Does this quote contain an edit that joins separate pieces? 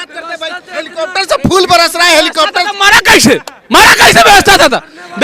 no; 0 cuts

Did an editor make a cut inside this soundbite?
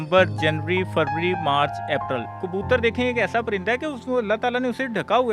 yes; 1 cut; at 2.4 s

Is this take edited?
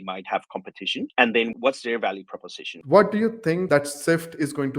yes; 2 cuts; at 2.7 s, 3.7 s

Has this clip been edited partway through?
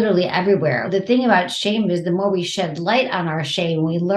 no; 0 cuts

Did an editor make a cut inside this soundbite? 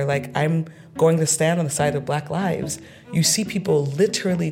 no; 0 cuts

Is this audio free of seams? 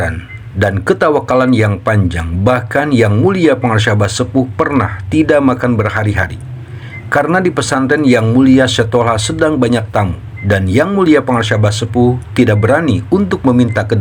yes; 0 cuts

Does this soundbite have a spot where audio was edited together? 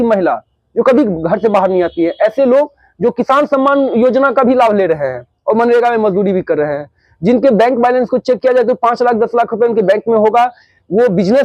no; 0 cuts

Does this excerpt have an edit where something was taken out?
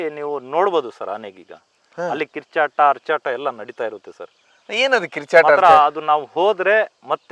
no; 0 cuts

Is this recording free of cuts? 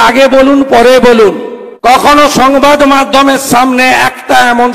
no; 1 cut; at 2.1 s

